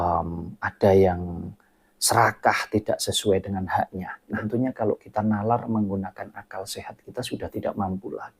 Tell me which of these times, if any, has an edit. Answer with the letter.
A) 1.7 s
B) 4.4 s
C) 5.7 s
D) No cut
B